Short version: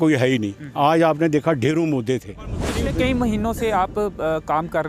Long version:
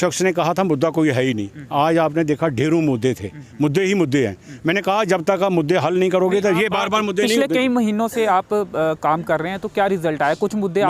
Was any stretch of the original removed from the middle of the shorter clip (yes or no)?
yes